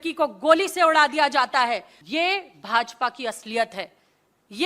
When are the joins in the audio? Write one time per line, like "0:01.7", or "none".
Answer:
0:02.0